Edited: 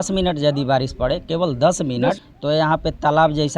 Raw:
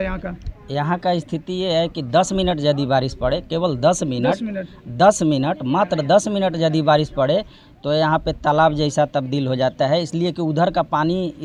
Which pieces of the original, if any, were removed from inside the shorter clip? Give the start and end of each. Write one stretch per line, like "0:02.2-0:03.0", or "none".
0:04.5-0:07.7